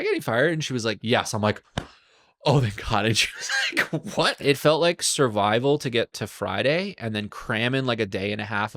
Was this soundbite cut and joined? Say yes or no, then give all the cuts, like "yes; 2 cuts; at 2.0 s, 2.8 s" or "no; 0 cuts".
yes; 2 cuts; at 1.0 s, 4.4 s